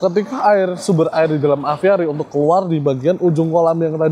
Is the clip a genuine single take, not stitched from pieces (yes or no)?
yes